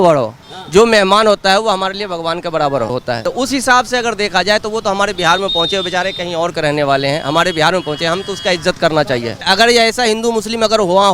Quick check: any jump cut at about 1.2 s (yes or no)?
no